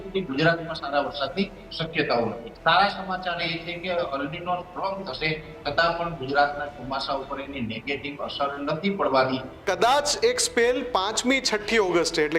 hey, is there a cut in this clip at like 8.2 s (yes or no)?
no